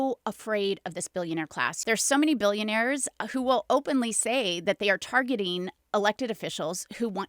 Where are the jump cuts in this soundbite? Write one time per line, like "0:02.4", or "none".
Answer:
0:01.8

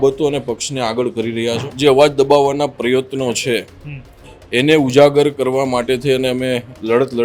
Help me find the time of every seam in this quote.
0:01.7

